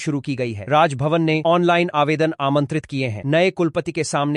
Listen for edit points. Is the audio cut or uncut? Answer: uncut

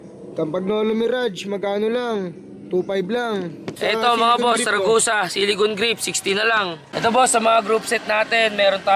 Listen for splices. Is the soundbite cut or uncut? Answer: cut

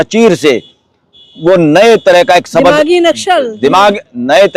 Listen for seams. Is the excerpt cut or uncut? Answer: uncut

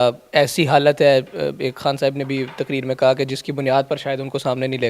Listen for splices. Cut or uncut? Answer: uncut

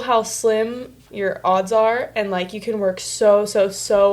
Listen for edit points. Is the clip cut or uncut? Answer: cut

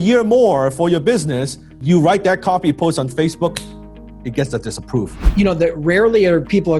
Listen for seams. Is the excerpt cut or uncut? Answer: cut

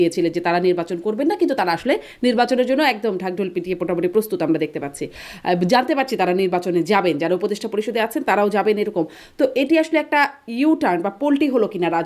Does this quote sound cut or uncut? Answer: uncut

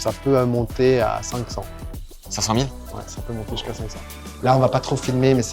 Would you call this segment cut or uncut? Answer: cut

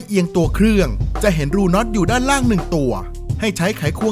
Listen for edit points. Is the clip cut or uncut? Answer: uncut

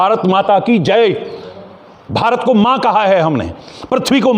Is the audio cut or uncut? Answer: uncut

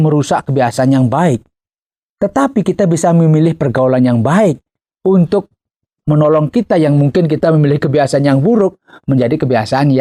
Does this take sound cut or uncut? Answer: uncut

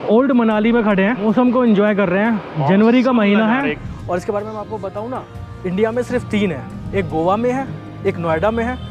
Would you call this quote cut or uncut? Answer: cut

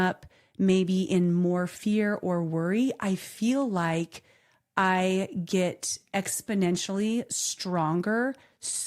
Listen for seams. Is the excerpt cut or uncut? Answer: uncut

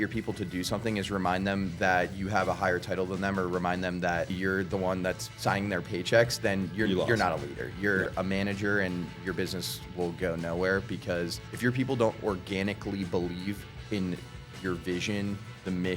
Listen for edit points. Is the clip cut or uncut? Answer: cut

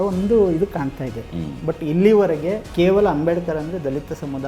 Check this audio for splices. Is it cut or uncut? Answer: cut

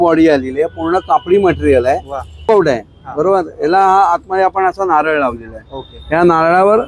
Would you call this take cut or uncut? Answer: cut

